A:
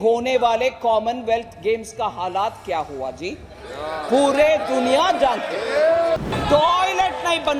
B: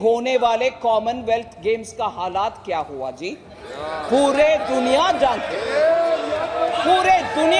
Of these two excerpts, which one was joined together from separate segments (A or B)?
A